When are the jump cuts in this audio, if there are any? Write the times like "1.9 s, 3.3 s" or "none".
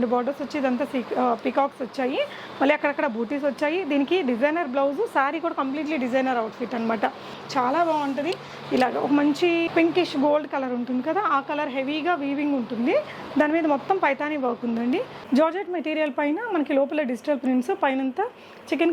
7.4 s, 15.1 s